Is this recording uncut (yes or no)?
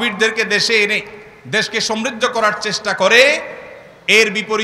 yes